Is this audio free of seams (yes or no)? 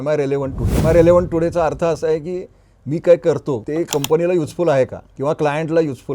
no